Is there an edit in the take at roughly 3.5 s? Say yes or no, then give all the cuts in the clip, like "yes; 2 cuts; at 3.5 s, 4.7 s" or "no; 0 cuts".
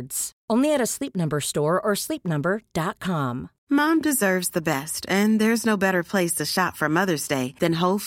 yes; 1 cut; at 3.5 s